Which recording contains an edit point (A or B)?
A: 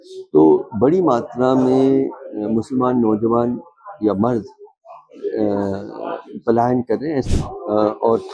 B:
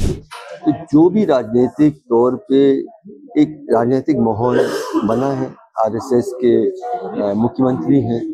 A